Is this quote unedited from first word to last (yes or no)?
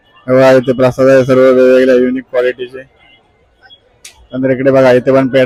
yes